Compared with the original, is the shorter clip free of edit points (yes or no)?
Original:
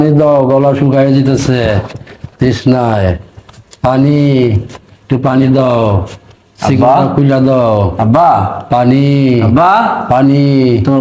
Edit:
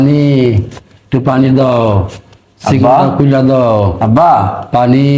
yes